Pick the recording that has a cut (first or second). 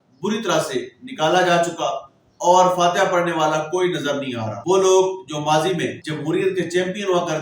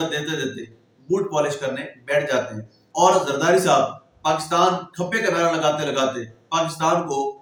first